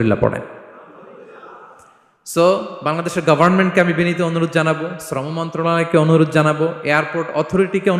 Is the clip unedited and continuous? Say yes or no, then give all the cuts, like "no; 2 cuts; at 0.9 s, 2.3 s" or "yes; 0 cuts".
yes; 0 cuts